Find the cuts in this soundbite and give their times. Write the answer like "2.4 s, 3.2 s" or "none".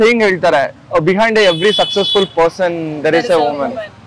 none